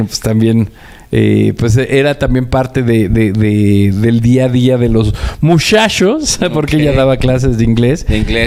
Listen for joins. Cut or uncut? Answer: uncut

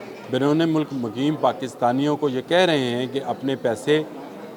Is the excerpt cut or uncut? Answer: uncut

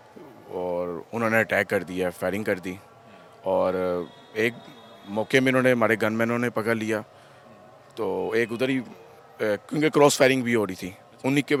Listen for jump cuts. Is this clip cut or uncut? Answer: uncut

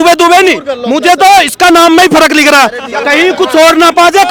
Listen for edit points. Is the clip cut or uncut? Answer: uncut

